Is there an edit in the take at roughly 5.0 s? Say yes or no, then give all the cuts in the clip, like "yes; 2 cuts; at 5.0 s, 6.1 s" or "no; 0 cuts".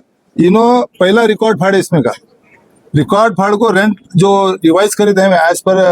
no; 0 cuts